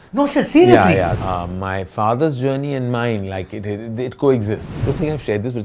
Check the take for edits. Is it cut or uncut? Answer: cut